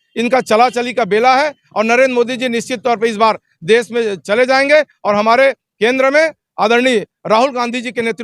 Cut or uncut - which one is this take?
uncut